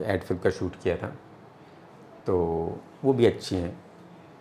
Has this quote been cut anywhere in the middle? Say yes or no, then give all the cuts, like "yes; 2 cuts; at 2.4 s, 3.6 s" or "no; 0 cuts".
no; 0 cuts